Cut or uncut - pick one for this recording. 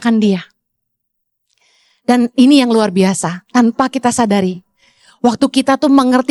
uncut